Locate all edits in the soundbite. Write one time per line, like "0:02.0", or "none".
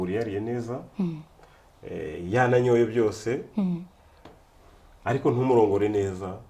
none